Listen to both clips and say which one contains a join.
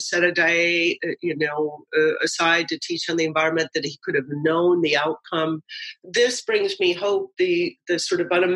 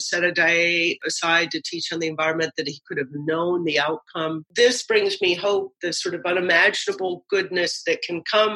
second; 3 cuts; at 1.0 s, 4.4 s, 5.7 s

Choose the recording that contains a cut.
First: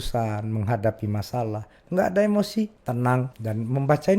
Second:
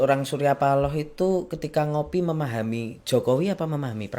first; 2 cuts; at 2.8 s, 3.4 s

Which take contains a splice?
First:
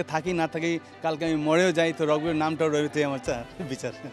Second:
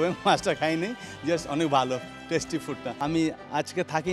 second; 1 cut; at 2.9 s

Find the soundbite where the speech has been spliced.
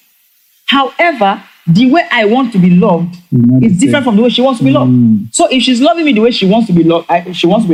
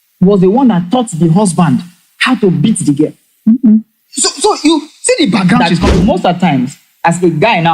second; 1 cut; at 5.9 s

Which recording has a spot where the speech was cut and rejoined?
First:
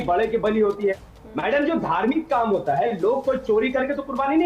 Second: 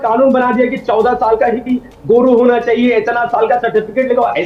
first; 1 cut; at 1.1 s

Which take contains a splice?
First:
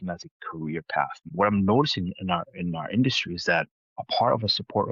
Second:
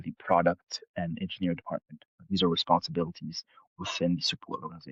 first; 2 cuts; at 1.2 s, 3.9 s

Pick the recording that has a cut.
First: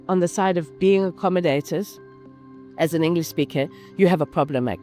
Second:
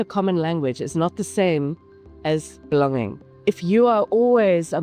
second; 1 cut; at 3.3 s

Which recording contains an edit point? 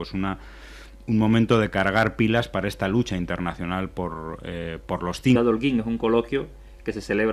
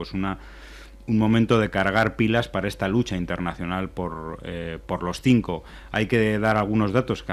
second; 1 cut; at 5.3 s

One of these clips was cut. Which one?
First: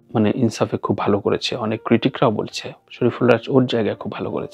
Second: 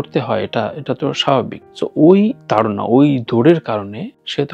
second; 1 cut; at 1.6 s

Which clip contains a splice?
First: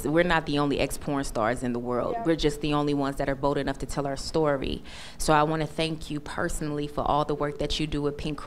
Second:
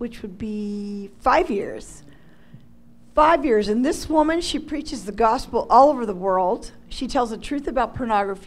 first; 1 cut; at 5.9 s

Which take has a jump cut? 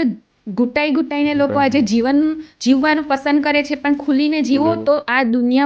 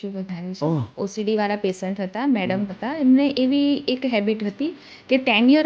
second; 1 cut; at 0.9 s

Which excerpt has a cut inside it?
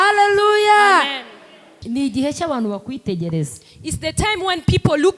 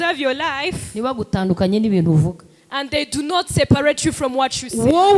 first; 1 cut; at 1.8 s

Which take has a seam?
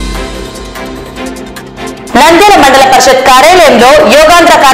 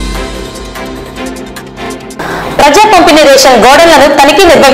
first; 1 cut; at 1.9 s

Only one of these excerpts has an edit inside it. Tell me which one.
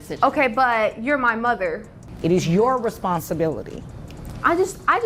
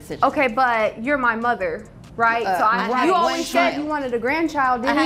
first; 1 cut; at 2.0 s

